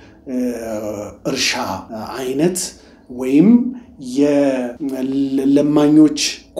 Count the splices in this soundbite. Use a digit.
2